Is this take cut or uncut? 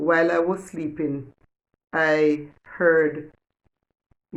uncut